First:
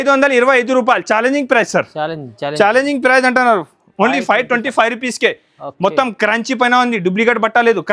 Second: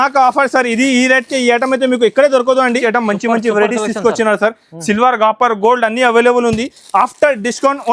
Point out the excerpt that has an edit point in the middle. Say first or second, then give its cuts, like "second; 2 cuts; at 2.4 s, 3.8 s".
second; 1 cut; at 2.7 s